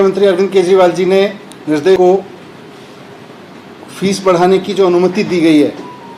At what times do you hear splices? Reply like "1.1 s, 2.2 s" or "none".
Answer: 2.0 s